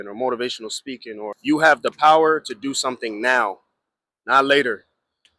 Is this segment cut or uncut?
cut